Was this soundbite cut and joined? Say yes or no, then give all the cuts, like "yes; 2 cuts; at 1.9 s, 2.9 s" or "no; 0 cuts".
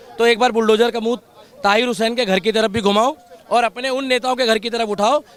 no; 0 cuts